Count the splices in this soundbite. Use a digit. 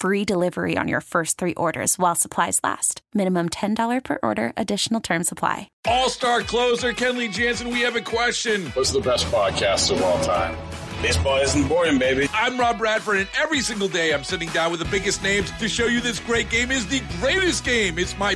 1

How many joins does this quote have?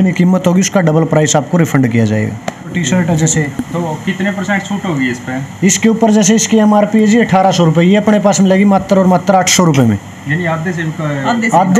1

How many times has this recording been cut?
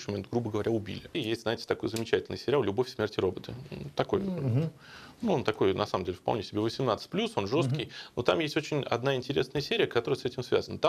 1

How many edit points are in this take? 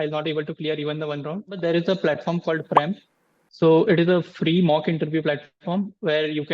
1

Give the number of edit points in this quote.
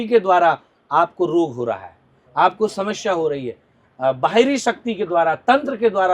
0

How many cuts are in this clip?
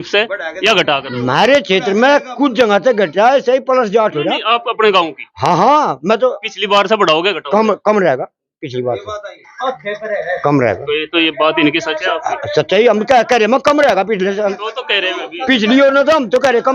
0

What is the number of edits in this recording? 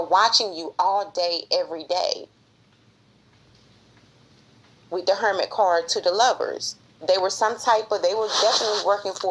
1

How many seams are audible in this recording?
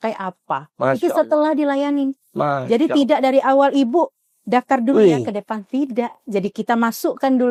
0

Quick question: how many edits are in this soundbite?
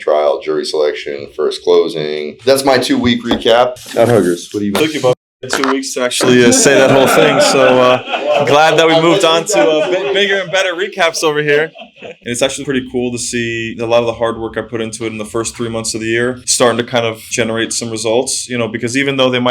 2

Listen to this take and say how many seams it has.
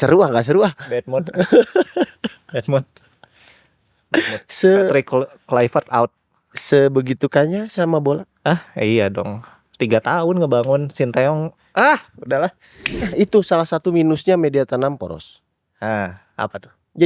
1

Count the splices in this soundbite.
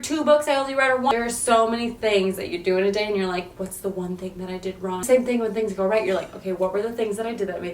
2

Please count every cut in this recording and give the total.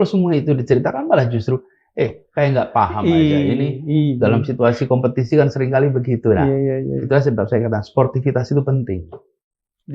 0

